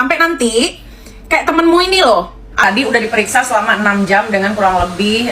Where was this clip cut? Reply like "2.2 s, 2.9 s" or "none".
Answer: 2.6 s